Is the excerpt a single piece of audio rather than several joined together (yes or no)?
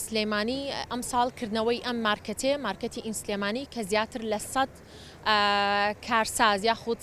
yes